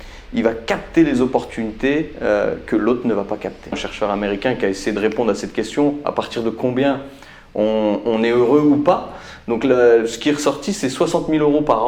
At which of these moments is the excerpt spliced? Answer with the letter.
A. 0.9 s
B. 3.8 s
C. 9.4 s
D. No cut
B